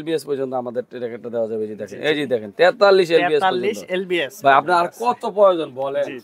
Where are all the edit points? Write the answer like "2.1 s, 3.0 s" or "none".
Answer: none